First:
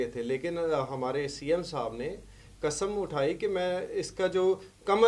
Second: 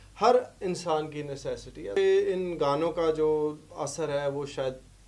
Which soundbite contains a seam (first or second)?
second